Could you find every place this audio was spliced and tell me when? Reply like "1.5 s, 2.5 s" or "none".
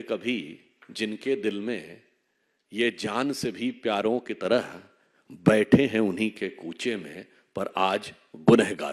none